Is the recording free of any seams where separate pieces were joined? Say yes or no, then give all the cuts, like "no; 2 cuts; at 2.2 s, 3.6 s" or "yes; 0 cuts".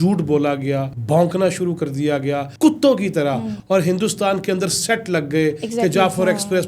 no; 3 cuts; at 0.9 s, 2.5 s, 3.5 s